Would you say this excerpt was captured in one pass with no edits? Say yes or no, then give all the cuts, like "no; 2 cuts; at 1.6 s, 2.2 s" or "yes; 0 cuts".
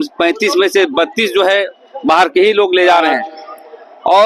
yes; 0 cuts